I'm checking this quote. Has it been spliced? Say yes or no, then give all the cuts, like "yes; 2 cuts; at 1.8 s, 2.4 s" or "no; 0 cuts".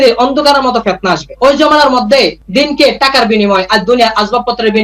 yes; 1 cut; at 2.4 s